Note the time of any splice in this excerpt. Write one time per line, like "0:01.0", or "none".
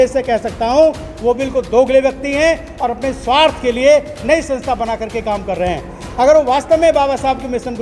none